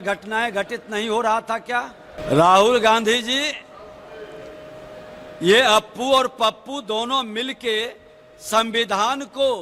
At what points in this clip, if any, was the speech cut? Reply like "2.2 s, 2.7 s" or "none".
2.1 s